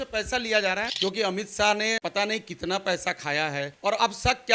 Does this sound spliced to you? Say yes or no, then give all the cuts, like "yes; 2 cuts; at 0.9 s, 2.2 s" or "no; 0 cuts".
yes; 3 cuts; at 0.9 s, 2.0 s, 3.7 s